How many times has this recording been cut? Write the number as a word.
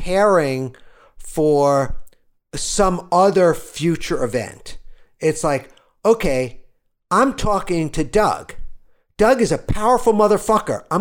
zero